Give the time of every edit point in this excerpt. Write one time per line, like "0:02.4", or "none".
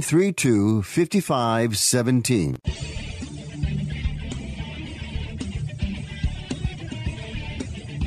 0:02.6